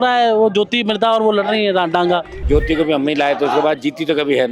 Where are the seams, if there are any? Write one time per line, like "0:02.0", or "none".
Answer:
0:02.4